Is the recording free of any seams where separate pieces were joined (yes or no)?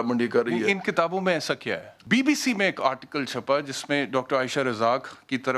no